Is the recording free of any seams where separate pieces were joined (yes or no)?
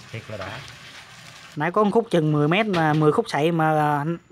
no